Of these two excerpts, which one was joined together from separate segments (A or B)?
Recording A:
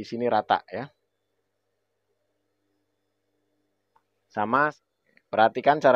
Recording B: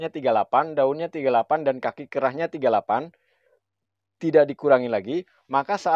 A